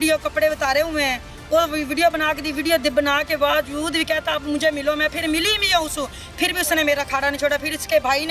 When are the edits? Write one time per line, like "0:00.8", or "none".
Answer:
none